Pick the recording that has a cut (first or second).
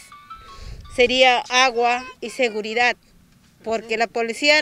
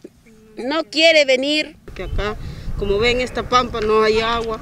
second